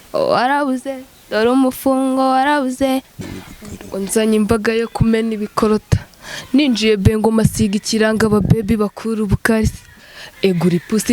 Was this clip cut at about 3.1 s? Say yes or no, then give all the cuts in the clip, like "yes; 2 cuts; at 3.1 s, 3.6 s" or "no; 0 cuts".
yes; 1 cut; at 3.1 s